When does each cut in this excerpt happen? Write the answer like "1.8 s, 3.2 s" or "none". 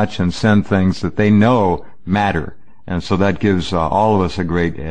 2.3 s